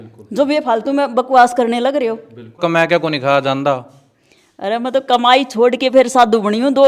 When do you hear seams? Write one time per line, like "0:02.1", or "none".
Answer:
0:02.6